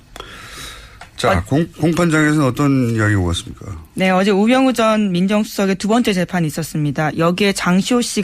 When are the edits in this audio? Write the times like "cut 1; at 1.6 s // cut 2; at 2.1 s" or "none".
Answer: cut 1; at 2.8 s